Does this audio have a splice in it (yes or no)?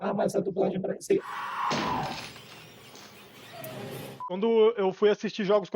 yes